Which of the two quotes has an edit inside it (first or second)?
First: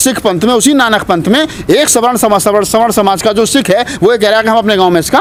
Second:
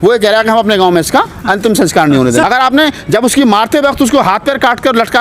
second